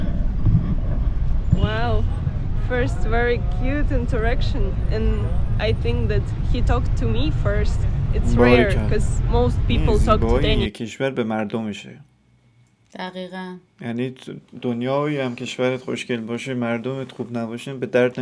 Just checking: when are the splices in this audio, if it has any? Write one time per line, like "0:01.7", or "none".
none